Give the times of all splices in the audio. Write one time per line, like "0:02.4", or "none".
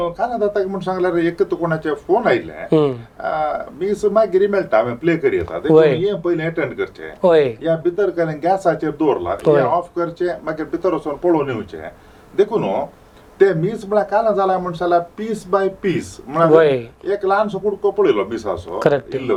none